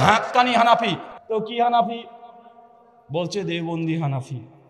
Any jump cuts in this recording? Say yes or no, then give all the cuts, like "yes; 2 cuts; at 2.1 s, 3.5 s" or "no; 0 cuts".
no; 0 cuts